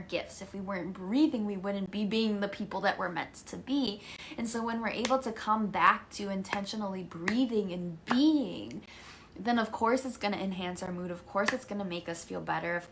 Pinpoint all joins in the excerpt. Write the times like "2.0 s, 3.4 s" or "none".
none